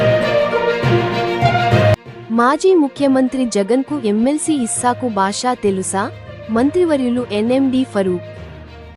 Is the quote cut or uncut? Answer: uncut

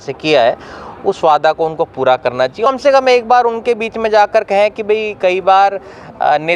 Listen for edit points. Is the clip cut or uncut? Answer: cut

